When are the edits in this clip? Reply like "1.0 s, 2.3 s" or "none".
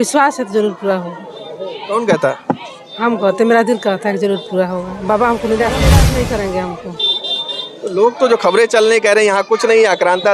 5.9 s

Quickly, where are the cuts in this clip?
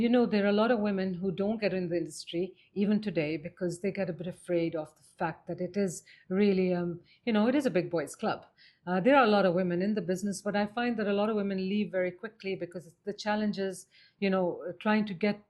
none

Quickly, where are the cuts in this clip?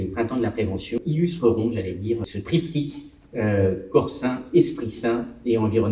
1.0 s, 2.2 s

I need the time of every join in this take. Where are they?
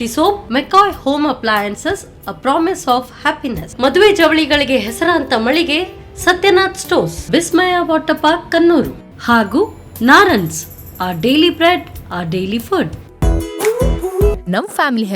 13.0 s

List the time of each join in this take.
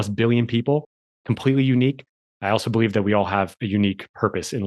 none

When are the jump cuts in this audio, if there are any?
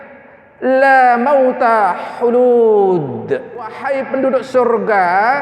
3.8 s

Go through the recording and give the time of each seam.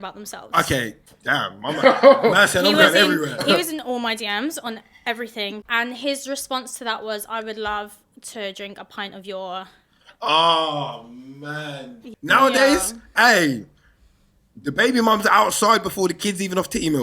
1.1 s, 5.6 s, 12.1 s

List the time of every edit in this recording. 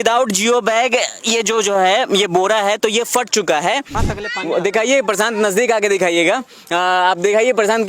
4.0 s

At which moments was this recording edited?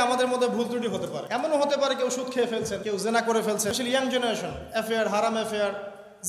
1.2 s, 2.8 s, 3.7 s

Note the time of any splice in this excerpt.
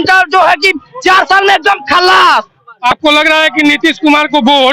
2.6 s

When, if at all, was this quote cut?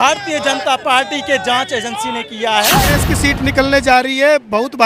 2.8 s

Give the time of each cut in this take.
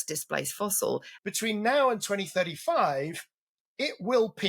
1.1 s

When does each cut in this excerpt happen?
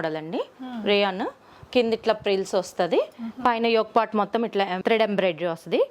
4.8 s

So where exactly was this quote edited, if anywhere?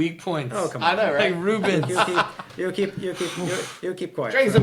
none

